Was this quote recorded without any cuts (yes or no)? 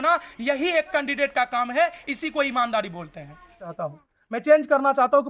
no